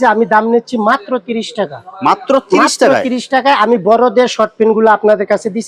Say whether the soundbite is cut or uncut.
uncut